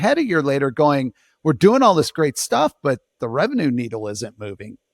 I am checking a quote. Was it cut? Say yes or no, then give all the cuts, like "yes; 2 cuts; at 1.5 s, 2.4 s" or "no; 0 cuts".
no; 0 cuts